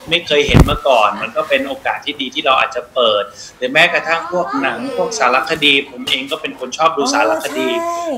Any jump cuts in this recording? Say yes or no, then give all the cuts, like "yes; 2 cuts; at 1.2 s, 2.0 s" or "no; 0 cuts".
no; 0 cuts